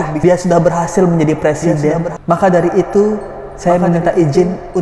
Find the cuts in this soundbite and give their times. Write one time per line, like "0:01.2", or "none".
none